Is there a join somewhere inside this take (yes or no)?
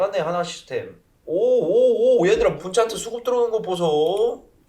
no